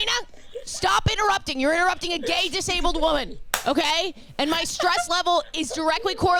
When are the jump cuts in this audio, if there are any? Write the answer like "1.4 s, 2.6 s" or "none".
none